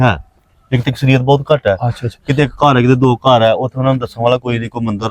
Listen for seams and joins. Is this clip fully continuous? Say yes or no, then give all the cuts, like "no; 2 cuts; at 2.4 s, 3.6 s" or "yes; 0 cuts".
yes; 0 cuts